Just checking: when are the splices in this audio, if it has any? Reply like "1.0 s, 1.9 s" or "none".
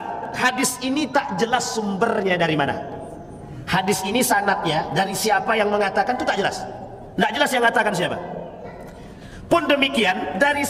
none